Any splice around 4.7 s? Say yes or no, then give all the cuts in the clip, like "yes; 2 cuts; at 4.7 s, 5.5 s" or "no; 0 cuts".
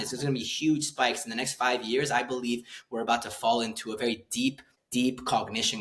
yes; 1 cut; at 4.7 s